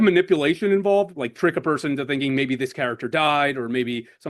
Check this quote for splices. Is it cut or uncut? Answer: cut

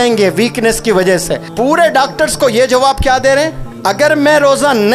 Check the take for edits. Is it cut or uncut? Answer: cut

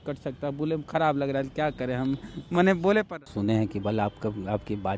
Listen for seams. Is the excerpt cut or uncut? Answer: cut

